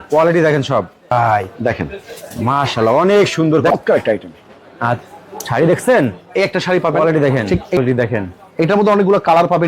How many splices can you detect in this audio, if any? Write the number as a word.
three